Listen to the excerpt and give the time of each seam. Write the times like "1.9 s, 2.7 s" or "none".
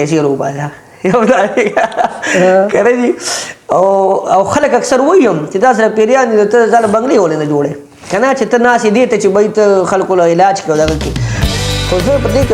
11.4 s